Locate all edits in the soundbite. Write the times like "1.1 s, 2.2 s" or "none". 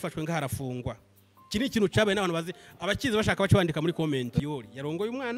4.4 s